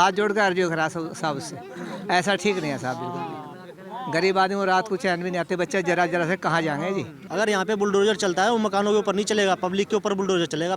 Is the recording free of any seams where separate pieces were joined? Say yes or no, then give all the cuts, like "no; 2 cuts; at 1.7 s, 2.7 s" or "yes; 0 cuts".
no; 1 cut; at 7.2 s